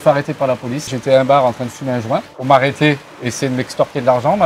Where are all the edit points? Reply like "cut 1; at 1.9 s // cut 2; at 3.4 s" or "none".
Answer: cut 1; at 0.9 s // cut 2; at 2.3 s